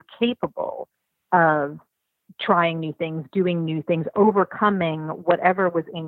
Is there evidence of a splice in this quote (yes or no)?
no